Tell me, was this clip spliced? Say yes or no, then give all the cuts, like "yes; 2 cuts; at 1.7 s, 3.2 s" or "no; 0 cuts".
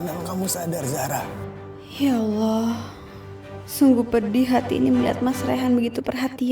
yes; 1 cut; at 1.9 s